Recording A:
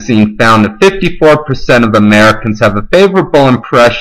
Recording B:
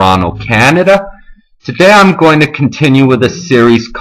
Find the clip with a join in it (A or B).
A